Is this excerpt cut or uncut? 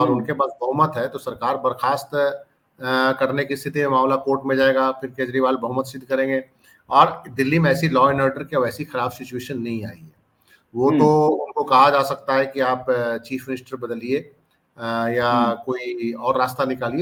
uncut